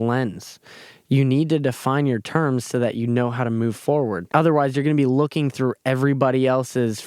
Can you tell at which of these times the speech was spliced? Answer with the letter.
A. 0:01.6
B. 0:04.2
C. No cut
B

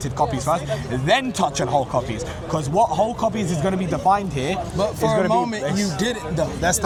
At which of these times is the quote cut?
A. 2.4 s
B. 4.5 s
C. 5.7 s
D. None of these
D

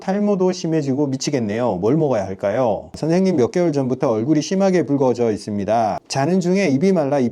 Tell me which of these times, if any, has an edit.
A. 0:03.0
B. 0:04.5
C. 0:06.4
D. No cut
A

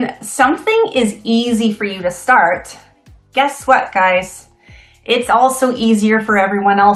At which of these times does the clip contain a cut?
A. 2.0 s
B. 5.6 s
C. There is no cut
C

